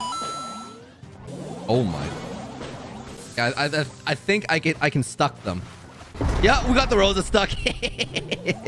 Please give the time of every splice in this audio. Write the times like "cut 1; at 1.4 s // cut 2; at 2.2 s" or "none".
none